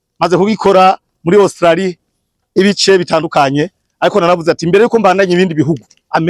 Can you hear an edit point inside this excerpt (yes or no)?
no